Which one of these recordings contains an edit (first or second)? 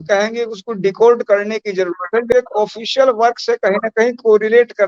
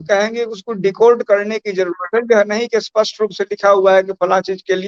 first